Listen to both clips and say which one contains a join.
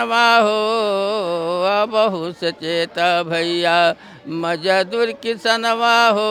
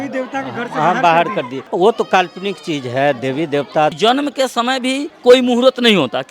second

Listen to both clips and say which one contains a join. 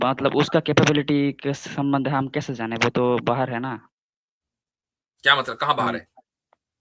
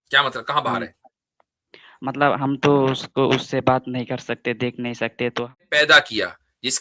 second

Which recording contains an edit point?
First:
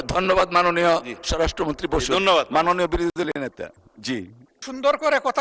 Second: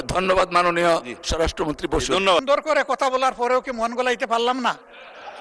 second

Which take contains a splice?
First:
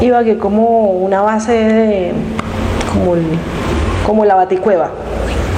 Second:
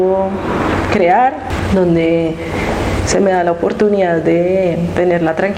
second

